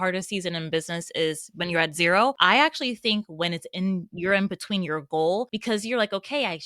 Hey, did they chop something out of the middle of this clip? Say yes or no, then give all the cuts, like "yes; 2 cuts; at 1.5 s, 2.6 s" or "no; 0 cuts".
yes; 2 cuts; at 2.4 s, 5.5 s